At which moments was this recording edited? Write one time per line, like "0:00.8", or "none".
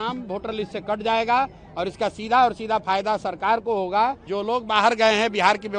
0:04.3